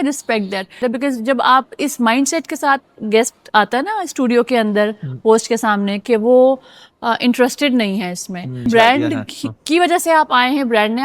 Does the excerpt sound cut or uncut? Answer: cut